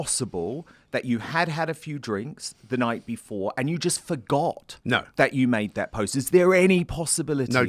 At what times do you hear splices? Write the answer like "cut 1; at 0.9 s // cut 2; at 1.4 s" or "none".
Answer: none